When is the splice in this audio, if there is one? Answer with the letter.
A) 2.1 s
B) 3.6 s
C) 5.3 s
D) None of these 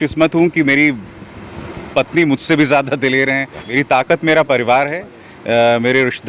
B